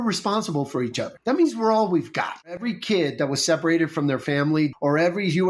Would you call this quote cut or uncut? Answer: cut